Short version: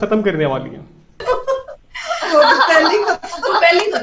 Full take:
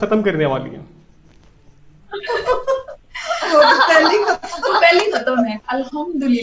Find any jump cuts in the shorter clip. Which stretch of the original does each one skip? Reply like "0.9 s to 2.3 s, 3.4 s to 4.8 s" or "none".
1.2 s to 2.4 s